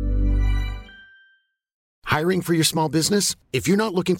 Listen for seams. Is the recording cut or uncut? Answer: cut